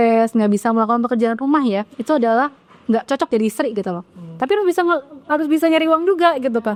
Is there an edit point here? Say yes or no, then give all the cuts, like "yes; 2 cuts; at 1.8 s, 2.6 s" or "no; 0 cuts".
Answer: no; 0 cuts